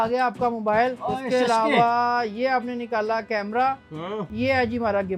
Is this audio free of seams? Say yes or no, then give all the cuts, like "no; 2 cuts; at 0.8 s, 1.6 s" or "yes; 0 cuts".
no; 2 cuts; at 1.1 s, 4.3 s